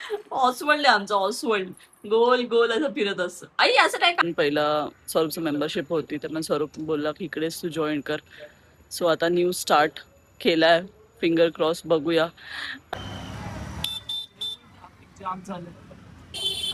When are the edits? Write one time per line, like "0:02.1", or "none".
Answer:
0:04.2
0:12.8